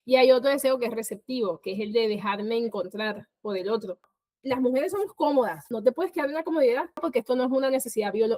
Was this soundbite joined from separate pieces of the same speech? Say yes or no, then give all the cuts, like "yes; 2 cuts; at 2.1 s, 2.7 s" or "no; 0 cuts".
yes; 3 cuts; at 4.1 s, 5.7 s, 7.0 s